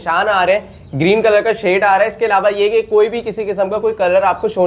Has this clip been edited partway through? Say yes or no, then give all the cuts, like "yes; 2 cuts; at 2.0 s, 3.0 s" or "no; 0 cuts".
no; 0 cuts